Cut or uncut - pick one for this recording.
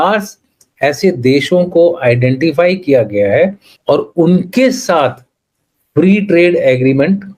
cut